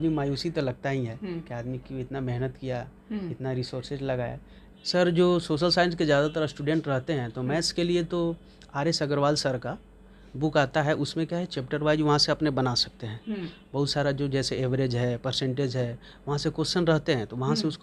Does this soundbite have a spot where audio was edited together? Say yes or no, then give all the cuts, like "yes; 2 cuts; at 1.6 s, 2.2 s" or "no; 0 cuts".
yes; 1 cut; at 4.5 s